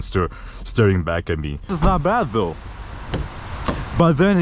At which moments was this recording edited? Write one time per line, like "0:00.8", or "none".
0:01.7